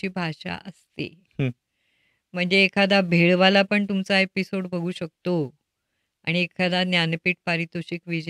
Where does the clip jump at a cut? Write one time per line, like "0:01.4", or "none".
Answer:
none